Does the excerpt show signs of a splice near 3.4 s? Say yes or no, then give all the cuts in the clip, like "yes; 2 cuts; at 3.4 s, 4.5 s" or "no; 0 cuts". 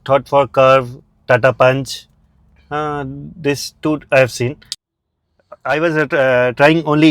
no; 1 cut; at 4.7 s